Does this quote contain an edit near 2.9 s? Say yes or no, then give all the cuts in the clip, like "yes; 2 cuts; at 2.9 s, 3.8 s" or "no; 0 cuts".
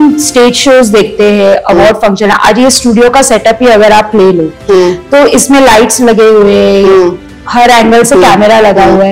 no; 0 cuts